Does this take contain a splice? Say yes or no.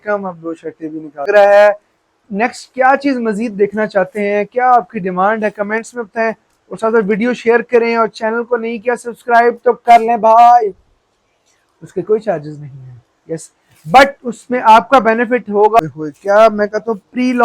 yes